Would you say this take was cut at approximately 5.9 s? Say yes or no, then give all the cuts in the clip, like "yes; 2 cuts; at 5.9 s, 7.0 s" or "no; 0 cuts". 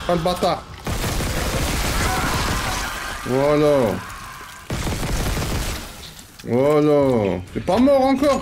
no; 1 cut; at 7.5 s